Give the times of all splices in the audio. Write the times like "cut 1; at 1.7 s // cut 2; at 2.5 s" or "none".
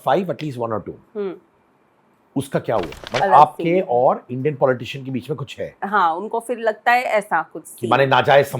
cut 1; at 3.0 s